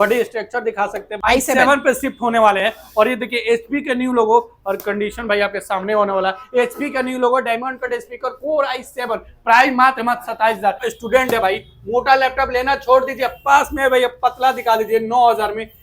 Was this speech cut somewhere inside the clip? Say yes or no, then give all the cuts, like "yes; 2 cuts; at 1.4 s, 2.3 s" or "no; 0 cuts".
yes; 2 cuts; at 1.1 s, 10.9 s